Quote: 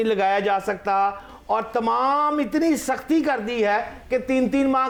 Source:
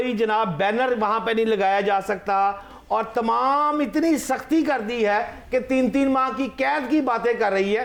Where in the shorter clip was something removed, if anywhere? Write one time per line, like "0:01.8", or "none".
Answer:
none